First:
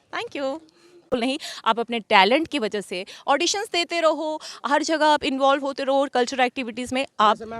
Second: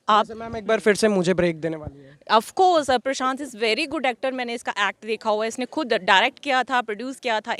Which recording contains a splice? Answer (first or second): first